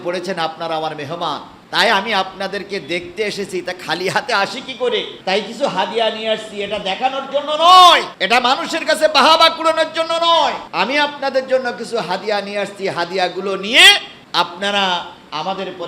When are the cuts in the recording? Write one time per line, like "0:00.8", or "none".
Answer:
0:01.5
0:05.1
0:08.1
0:10.6
0:14.1

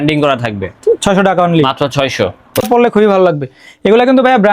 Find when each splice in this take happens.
0:02.6

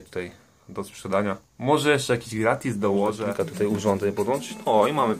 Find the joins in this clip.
0:03.2

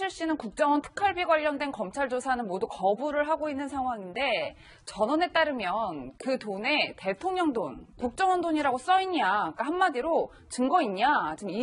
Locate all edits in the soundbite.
none

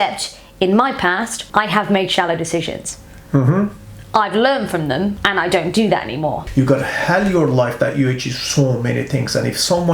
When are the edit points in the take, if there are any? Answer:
0:01.4
0:05.2
0:06.4

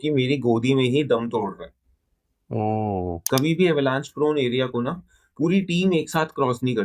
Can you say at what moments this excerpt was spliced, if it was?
0:03.2

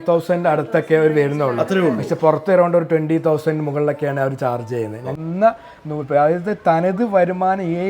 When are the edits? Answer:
0:05.2

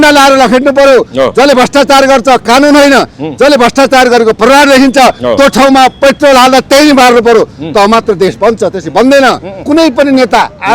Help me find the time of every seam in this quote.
0:09.6

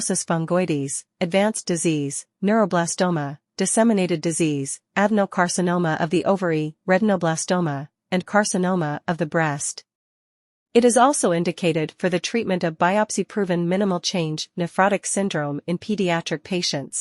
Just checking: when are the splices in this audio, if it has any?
0:14.7

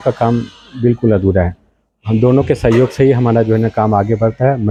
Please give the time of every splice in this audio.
none

